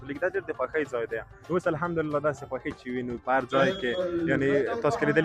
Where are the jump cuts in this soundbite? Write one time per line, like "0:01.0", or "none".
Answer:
0:01.3